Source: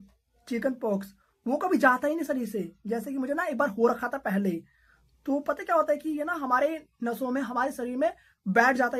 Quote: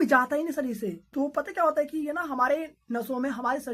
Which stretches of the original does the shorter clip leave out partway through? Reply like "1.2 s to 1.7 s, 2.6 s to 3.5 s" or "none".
2.7 s to 5.1 s